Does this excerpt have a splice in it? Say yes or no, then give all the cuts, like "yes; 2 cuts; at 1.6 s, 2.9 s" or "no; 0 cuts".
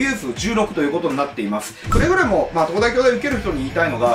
yes; 1 cut; at 1.9 s